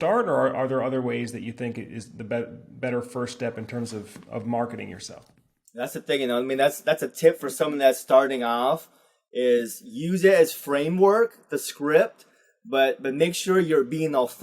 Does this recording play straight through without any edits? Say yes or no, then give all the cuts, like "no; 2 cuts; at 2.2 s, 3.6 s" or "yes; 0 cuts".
no; 1 cut; at 5.4 s